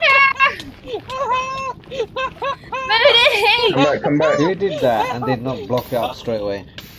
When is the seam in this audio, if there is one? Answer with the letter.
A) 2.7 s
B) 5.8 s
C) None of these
C